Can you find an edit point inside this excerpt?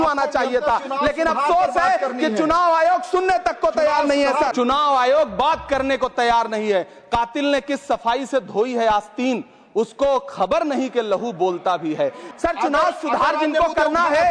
yes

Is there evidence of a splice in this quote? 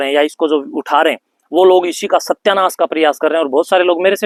no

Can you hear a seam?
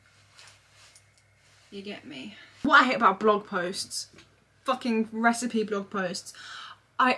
yes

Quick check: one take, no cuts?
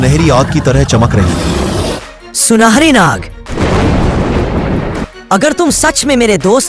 no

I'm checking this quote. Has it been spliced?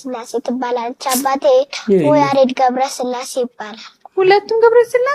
no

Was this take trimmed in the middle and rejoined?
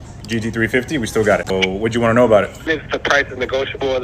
yes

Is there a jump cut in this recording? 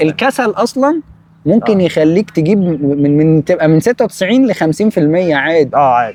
no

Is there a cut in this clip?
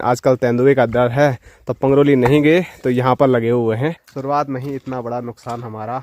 yes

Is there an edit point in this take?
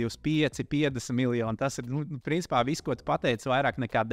no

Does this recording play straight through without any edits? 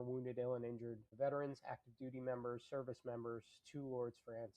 no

